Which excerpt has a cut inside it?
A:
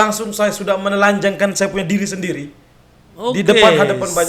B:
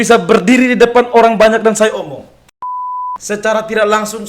B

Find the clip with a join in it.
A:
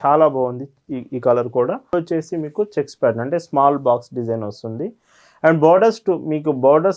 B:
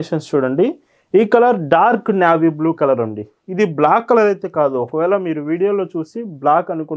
A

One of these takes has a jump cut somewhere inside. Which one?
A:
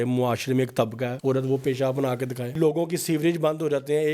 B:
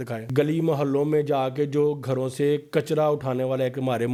A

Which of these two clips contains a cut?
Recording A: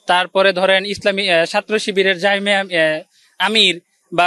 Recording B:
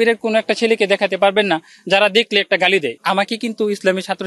B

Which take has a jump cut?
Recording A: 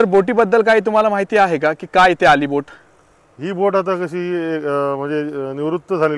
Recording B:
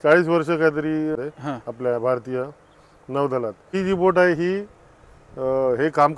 B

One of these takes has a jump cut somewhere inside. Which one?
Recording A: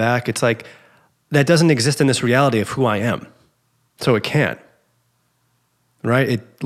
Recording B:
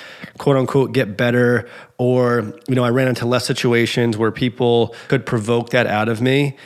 B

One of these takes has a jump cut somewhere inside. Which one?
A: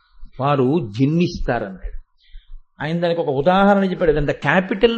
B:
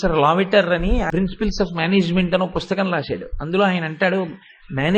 B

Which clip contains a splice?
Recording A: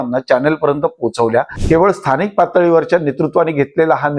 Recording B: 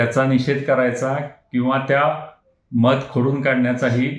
A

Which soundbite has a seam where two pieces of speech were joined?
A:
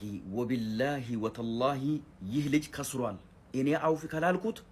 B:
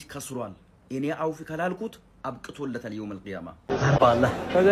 B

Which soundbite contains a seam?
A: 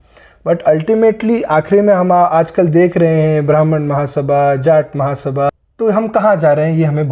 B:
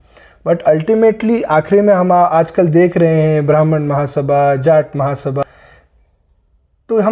A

